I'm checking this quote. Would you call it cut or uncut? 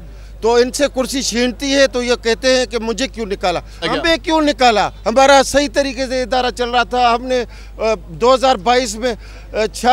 cut